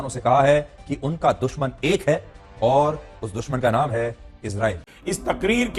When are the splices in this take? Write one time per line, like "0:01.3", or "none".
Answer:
0:04.9